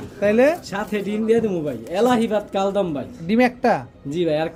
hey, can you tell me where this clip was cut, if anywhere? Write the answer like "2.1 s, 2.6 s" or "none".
none